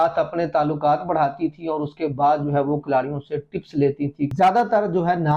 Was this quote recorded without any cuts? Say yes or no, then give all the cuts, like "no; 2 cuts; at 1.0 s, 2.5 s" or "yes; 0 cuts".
no; 1 cut; at 4.3 s